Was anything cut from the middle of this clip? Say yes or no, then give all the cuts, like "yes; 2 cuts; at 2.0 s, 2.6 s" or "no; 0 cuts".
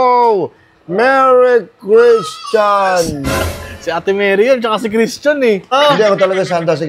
yes; 1 cut; at 5.7 s